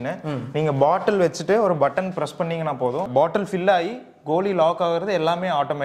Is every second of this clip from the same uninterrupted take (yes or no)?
yes